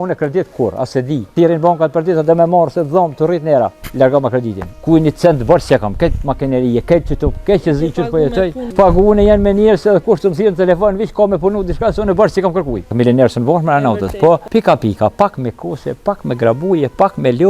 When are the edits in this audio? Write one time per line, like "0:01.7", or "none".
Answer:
0:01.3
0:03.8
0:04.6
0:08.6
0:12.9
0:14.4